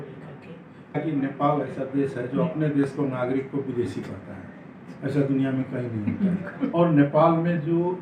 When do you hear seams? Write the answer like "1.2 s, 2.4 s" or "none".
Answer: 0.9 s, 6.7 s

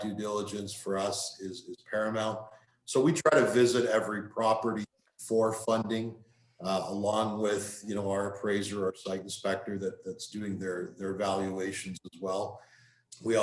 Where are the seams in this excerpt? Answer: none

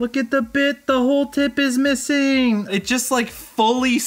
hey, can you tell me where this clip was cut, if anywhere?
2.7 s

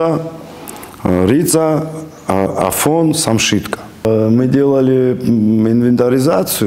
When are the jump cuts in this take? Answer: 4.0 s

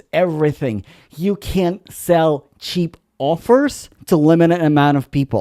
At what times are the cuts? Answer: 3.9 s

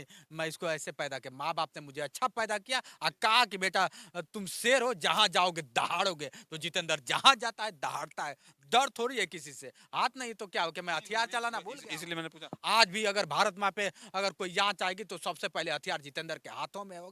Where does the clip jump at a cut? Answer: none

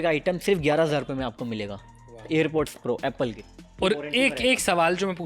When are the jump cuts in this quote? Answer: none

